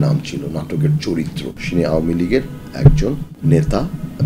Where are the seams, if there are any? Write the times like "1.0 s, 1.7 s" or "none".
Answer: 1.6 s, 3.3 s